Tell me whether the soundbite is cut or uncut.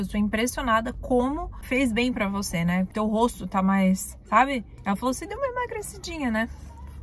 cut